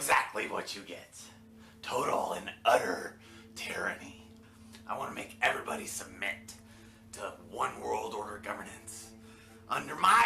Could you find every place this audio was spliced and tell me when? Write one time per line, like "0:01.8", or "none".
none